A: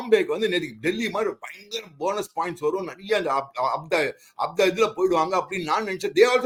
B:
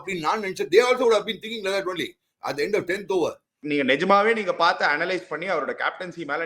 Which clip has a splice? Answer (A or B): B